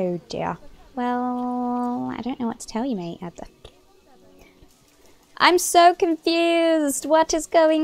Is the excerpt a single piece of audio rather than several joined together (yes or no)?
no